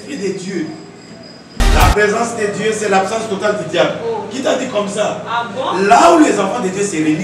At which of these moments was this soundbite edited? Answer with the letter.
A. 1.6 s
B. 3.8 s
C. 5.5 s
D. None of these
A